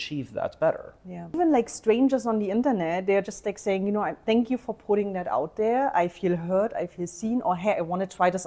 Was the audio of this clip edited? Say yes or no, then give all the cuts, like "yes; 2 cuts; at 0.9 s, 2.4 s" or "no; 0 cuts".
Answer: yes; 1 cut; at 1.4 s